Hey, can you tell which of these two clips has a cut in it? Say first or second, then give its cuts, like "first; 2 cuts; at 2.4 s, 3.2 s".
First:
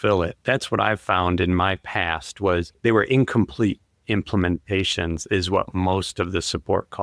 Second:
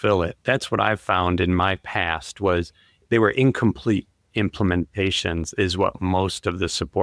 first; 1 cut; at 2.7 s